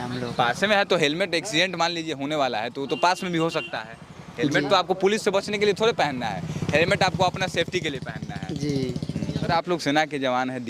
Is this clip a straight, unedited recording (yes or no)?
no